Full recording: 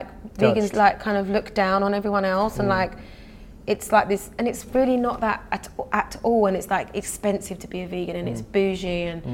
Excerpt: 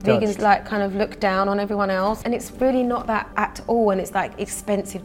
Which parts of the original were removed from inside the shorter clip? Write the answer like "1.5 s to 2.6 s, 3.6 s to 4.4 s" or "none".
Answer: 2.5 s to 4.3 s, 5.4 s to 5.8 s